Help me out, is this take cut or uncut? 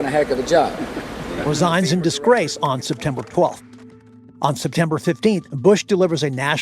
cut